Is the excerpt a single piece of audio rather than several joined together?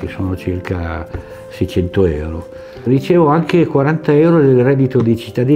yes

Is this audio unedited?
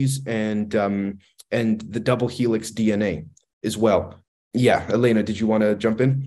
no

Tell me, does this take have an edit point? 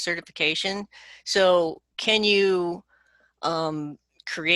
no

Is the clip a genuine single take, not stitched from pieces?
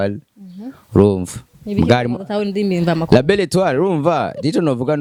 yes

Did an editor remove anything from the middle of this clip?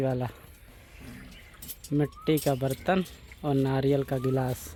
no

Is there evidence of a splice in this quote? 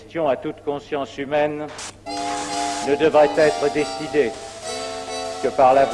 no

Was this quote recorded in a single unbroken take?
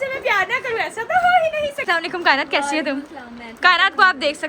no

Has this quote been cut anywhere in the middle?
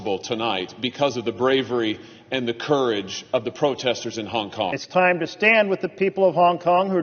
yes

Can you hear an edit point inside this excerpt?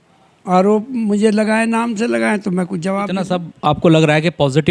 yes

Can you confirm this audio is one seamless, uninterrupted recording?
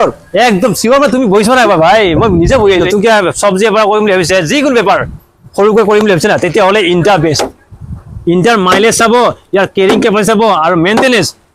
no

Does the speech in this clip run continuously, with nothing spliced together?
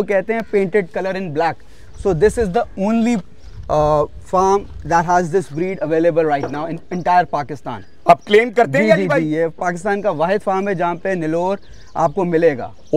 yes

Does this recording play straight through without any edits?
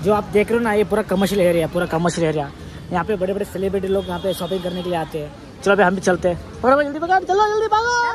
yes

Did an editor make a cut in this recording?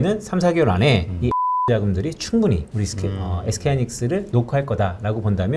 yes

